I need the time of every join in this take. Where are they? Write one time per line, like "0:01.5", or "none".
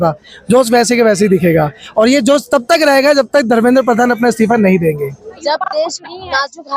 0:05.3